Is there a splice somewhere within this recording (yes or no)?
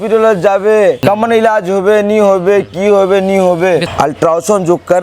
yes